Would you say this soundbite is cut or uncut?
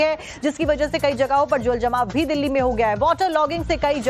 cut